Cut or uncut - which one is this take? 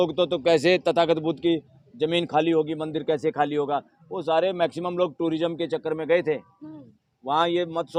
uncut